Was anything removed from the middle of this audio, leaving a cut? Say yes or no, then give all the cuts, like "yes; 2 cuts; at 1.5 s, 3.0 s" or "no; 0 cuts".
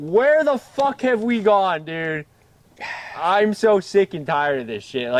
no; 0 cuts